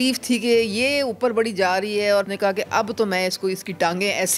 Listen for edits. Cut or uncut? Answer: cut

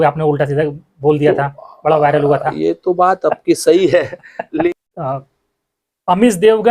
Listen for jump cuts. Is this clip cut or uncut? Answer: cut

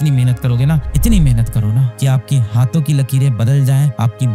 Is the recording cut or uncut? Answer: uncut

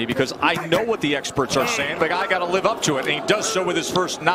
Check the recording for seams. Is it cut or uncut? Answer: uncut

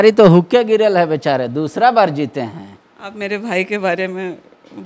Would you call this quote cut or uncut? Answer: uncut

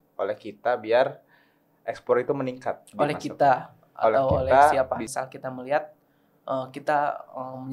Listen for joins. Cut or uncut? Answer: cut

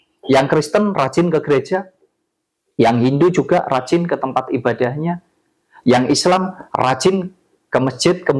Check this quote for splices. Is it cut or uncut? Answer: uncut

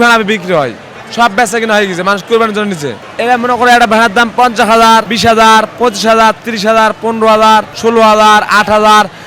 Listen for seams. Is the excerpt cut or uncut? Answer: cut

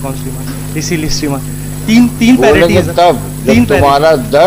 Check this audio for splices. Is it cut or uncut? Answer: uncut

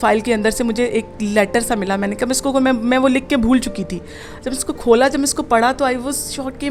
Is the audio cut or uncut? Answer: uncut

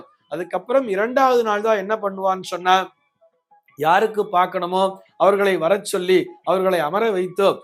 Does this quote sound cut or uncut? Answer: uncut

